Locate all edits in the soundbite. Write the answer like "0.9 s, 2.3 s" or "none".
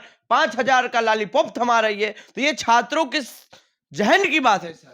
none